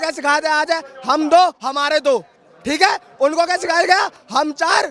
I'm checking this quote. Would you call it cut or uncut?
uncut